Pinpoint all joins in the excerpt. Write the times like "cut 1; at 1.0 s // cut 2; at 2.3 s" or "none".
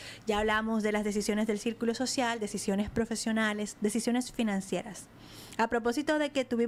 none